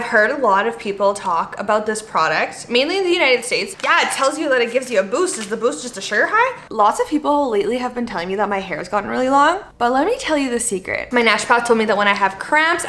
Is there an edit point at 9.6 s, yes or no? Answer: yes